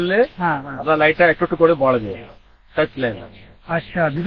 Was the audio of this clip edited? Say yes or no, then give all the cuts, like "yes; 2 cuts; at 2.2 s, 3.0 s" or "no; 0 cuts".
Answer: no; 0 cuts